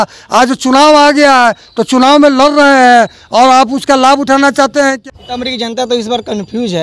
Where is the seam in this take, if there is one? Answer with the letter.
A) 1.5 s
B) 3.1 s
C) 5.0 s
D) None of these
C